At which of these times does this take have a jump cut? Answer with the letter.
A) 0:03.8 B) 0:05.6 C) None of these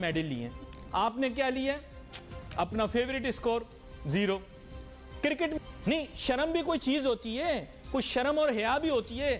B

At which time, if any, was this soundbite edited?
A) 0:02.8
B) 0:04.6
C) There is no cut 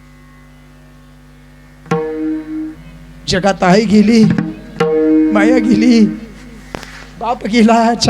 A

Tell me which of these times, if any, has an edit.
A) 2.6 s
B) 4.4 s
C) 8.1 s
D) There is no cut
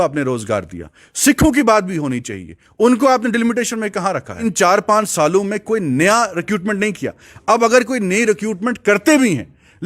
B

